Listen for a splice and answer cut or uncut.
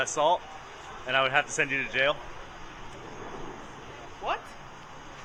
uncut